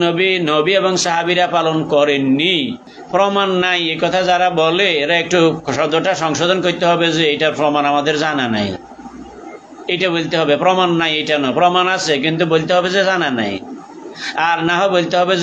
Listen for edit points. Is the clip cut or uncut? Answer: cut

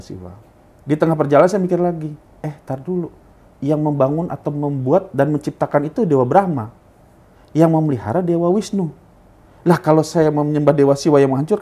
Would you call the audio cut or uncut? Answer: uncut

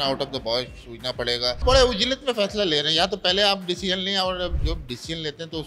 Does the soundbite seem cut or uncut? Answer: cut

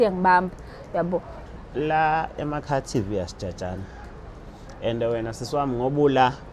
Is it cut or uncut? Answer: cut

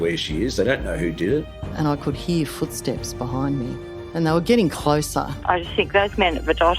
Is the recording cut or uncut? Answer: cut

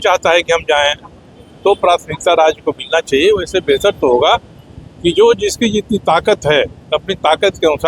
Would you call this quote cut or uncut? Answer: uncut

